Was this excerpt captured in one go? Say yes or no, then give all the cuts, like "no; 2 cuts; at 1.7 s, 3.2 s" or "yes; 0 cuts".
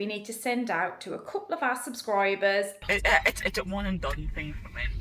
no; 1 cut; at 2.9 s